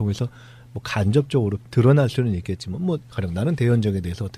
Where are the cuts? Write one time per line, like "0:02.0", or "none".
none